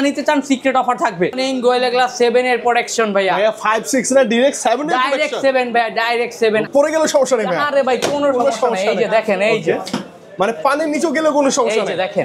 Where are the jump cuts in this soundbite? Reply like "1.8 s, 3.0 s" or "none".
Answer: 1.3 s, 6.7 s